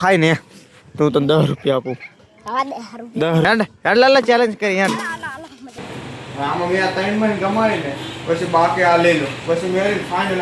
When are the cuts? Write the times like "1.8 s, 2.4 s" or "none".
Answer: 3.4 s, 5.7 s